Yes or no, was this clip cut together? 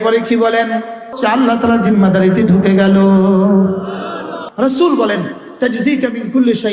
yes